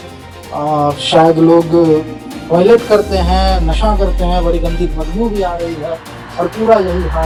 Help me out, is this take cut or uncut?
uncut